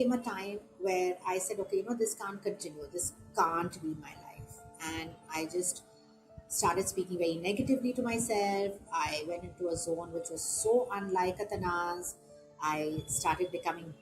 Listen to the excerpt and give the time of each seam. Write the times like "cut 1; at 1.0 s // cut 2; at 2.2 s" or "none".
none